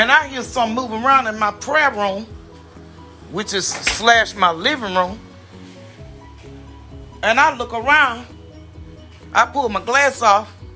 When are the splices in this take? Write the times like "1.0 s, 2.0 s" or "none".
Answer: none